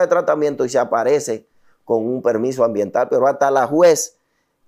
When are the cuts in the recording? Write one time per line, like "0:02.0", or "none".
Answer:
none